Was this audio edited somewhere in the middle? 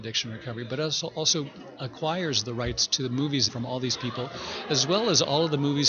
yes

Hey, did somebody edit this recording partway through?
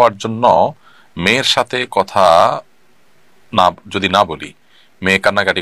no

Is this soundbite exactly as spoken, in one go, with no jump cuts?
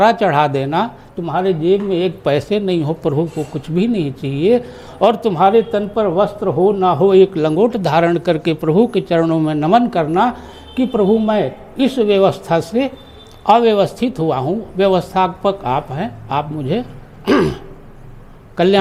yes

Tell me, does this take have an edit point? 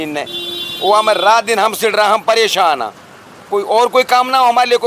no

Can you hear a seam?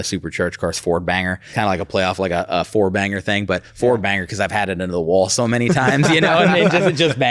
yes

